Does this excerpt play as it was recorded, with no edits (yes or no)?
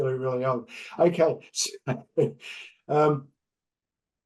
yes